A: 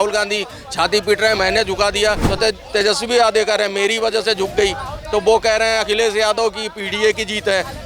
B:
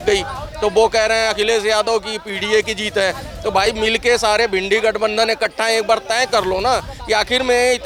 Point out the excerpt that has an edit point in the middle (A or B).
A